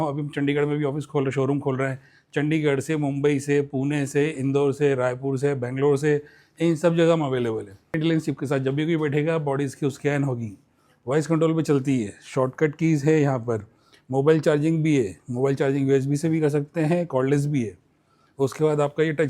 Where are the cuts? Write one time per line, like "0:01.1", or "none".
0:08.0